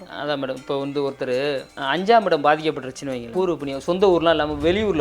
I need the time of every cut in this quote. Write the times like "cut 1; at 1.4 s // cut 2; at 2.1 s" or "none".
cut 1; at 1.7 s // cut 2; at 3.2 s